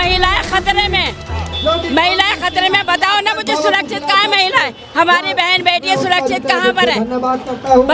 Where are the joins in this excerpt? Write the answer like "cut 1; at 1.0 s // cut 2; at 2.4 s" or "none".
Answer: none